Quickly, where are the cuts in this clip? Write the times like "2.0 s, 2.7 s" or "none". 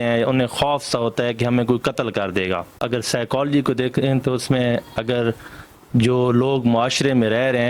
2.7 s